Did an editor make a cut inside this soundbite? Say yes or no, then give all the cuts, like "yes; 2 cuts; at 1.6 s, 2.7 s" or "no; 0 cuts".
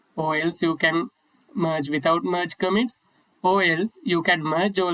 no; 0 cuts